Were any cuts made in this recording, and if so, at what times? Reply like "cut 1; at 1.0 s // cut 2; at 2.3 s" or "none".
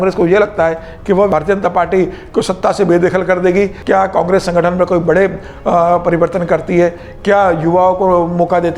cut 1; at 1.3 s // cut 2; at 3.8 s